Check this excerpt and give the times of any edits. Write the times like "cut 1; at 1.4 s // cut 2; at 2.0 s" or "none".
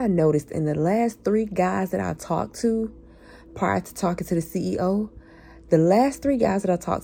none